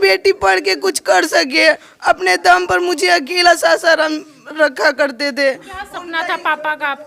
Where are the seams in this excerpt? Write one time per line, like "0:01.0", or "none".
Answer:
none